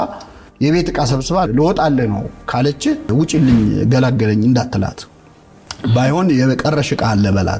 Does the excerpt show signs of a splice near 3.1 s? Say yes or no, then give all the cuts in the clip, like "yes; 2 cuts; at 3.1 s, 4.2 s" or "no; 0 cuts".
yes; 2 cuts; at 1.5 s, 3.1 s